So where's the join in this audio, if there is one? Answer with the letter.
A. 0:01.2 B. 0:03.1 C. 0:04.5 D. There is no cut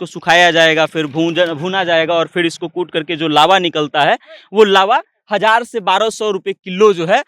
D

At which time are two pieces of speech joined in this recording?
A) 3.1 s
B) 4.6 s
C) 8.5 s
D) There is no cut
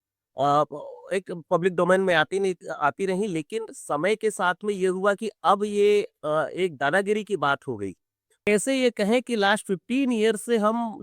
C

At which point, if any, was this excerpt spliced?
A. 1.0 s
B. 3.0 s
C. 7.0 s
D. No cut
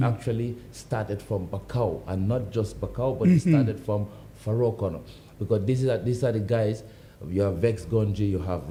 D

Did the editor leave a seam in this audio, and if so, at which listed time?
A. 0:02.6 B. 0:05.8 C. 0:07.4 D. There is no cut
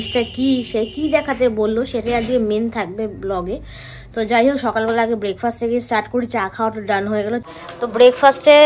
C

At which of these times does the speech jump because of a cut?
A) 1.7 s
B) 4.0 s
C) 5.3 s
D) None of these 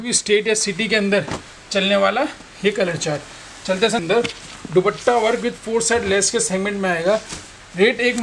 B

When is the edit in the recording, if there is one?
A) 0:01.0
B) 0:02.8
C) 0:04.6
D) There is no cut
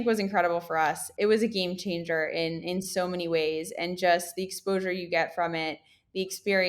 A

